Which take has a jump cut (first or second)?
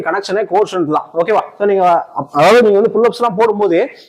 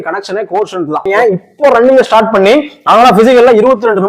second